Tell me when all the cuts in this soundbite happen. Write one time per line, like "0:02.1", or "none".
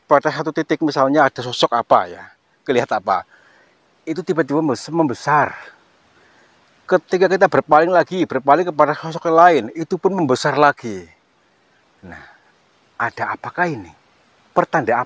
none